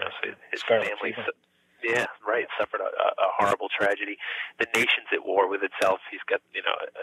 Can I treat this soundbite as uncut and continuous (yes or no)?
yes